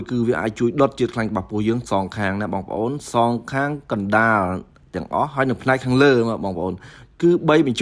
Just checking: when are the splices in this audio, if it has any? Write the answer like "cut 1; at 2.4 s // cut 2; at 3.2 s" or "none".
none